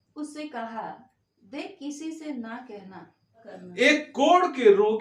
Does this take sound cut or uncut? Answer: cut